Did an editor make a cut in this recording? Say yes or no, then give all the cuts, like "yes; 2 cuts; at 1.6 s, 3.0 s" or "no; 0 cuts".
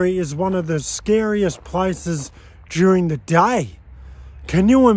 no; 0 cuts